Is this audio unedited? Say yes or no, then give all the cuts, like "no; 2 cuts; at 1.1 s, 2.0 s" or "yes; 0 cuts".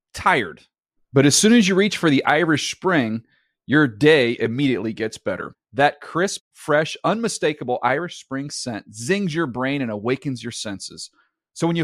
yes; 0 cuts